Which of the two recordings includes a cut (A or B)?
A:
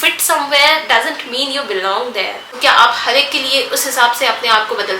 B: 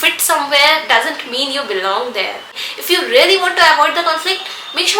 A